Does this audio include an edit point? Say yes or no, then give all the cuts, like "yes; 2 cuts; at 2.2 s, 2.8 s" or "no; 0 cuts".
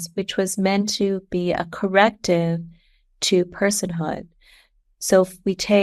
no; 0 cuts